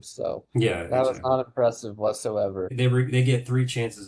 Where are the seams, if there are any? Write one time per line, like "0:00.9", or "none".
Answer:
0:02.7